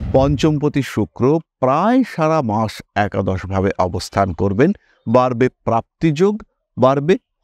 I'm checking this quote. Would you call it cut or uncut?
uncut